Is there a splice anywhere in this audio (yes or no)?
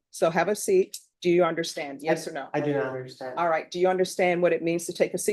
yes